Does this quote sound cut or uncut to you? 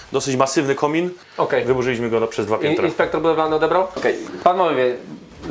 cut